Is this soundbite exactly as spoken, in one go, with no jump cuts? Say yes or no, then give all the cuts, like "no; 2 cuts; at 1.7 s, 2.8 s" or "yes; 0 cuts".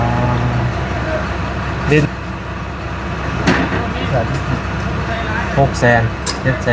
no; 1 cut; at 2.0 s